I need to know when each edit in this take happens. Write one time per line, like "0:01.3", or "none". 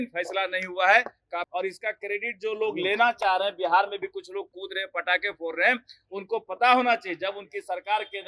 0:01.5